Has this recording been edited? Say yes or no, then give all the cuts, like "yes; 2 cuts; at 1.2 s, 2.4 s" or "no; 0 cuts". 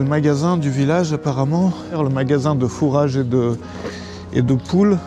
yes; 1 cut; at 2.0 s